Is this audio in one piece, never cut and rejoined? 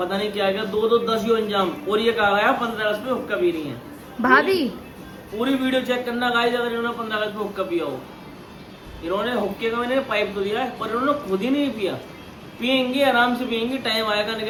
yes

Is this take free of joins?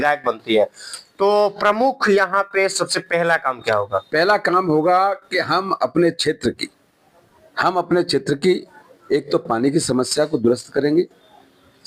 yes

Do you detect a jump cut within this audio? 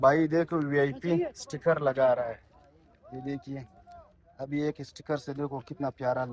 no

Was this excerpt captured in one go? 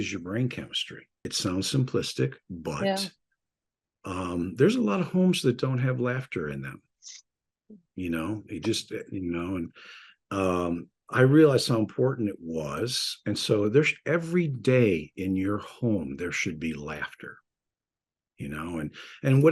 no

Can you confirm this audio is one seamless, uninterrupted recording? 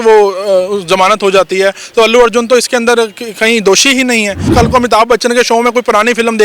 no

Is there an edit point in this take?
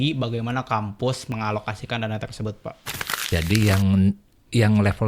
yes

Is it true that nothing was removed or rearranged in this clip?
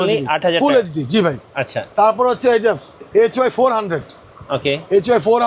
yes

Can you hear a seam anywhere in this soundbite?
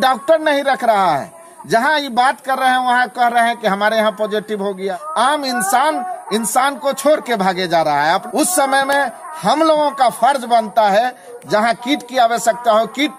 yes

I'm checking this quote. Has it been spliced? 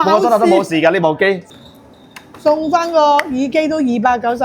yes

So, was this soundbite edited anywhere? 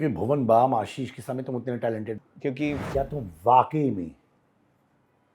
yes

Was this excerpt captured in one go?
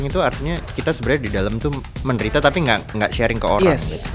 yes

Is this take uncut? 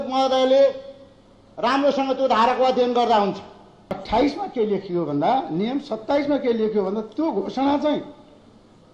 no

